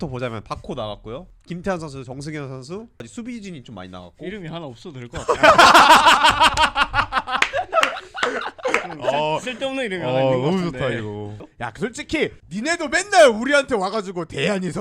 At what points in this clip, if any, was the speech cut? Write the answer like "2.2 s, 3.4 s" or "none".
1.3 s, 3.1 s, 11.4 s, 12.4 s